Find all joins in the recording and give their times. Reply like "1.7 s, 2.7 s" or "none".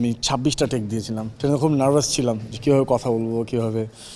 1.3 s